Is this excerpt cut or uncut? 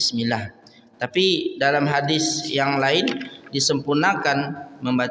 uncut